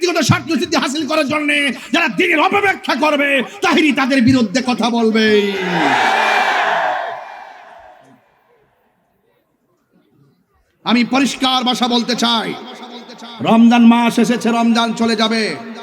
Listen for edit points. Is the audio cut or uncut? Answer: uncut